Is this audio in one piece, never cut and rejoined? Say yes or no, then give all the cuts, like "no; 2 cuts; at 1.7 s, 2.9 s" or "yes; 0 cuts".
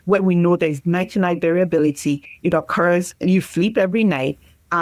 yes; 0 cuts